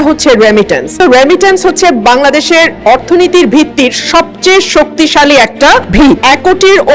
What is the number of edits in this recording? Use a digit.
2